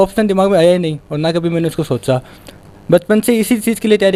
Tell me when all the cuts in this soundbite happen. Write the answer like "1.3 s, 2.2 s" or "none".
none